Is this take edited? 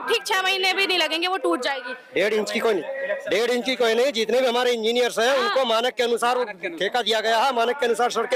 no; 0 cuts

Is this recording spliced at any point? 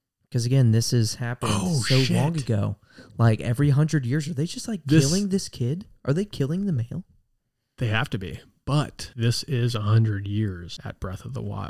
yes; 2 cuts; at 9.0 s, 10.7 s

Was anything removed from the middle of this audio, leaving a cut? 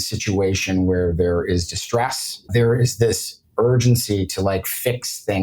yes; 1 cut; at 2.5 s

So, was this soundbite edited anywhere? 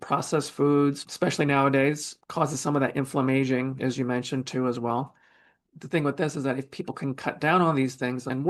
yes; 1 cut; at 1.0 s

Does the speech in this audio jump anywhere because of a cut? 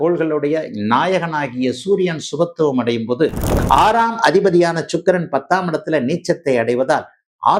yes; 1 cut; at 3.5 s

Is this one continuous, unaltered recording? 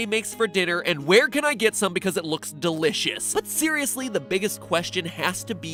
yes; 0 cuts

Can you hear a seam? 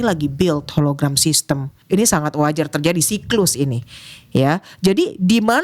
yes; 1 cut; at 1.7 s

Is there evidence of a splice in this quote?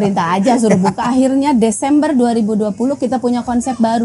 yes; 1 cut; at 1.0 s

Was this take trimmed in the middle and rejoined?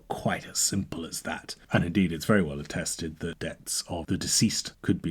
no; 0 cuts

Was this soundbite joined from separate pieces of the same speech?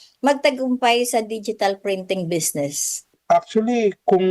yes; 1 cut; at 3.2 s

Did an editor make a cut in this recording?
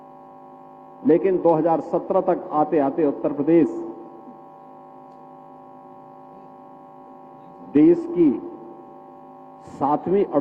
no; 0 cuts

